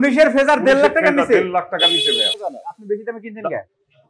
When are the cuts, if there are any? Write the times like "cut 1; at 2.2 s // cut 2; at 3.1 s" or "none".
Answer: cut 1; at 2.4 s